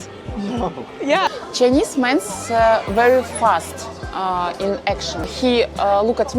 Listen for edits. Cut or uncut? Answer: cut